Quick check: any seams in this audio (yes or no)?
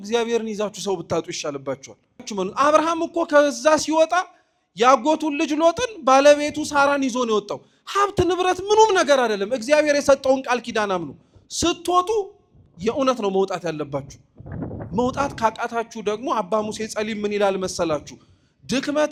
no